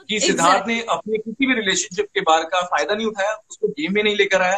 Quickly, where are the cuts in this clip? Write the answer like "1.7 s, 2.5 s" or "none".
none

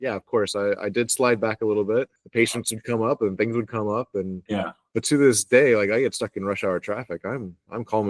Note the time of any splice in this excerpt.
2.2 s, 4.6 s

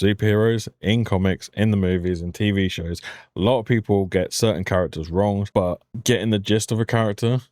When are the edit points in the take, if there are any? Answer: 5.8 s

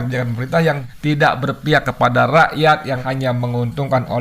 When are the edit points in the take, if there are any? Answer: 0.8 s, 3.0 s

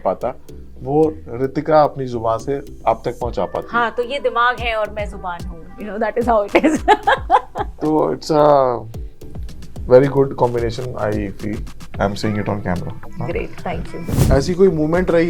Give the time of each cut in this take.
14.1 s

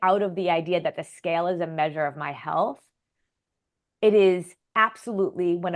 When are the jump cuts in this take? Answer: none

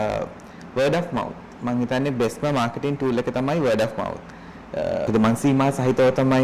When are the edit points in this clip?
5.1 s

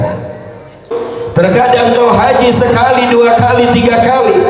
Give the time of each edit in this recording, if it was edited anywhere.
1.0 s

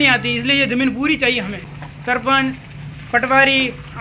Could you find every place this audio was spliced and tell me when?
1.7 s

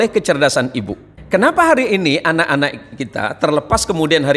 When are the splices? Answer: 1.1 s

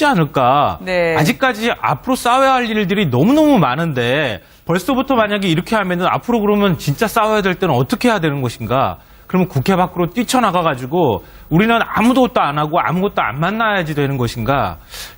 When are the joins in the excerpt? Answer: 2.1 s

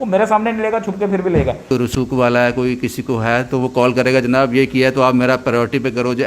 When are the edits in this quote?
1.7 s

